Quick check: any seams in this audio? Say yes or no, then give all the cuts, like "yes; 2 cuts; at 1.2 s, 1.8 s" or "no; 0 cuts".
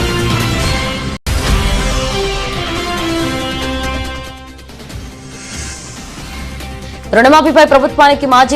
yes; 1 cut; at 1.2 s